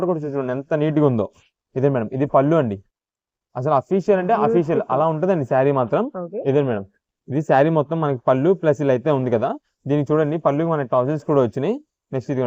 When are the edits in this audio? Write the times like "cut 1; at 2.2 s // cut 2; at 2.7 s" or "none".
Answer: none